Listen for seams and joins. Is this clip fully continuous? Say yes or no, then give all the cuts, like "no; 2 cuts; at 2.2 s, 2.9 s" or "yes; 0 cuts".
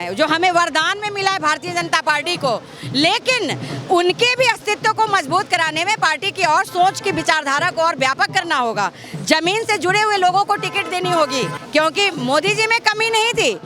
no; 1 cut; at 11.6 s